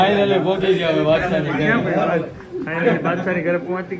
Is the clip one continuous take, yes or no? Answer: yes